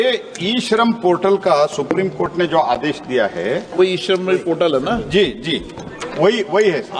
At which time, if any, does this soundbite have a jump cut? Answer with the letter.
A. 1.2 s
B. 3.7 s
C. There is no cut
B